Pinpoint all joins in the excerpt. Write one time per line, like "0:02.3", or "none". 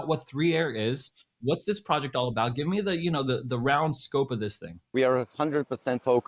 0:04.9